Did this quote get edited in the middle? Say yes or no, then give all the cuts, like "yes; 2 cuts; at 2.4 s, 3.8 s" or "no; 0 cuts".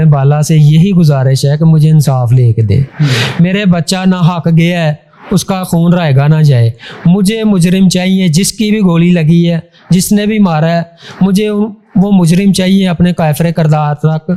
no; 0 cuts